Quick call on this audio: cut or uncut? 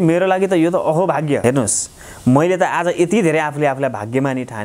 cut